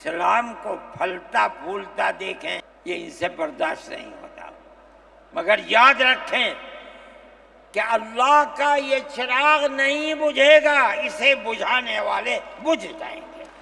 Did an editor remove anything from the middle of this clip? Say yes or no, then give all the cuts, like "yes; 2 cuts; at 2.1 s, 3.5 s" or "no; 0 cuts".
yes; 1 cut; at 2.7 s